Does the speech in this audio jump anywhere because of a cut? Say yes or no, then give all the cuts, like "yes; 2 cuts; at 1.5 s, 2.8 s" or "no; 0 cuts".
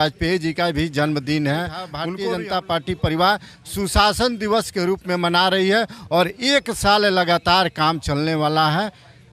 yes; 1 cut; at 2.0 s